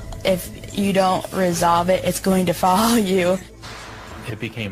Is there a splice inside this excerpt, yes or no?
yes